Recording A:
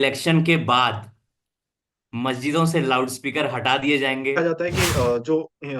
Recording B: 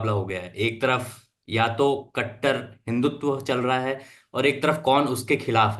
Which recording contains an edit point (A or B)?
A